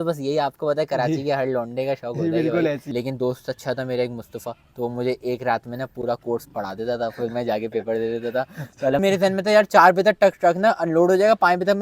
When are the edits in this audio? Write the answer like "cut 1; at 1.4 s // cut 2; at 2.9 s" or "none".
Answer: cut 1; at 2.8 s // cut 2; at 9.0 s